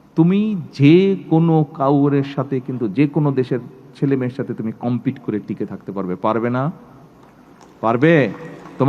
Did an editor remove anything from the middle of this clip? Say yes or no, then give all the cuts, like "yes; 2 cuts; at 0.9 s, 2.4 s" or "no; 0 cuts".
no; 0 cuts